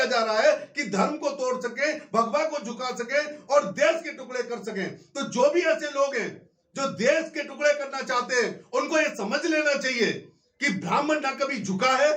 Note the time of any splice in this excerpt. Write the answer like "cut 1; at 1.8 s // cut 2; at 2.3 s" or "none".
none